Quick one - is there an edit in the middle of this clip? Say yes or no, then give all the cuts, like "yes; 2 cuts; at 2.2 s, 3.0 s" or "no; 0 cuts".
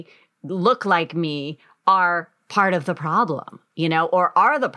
no; 0 cuts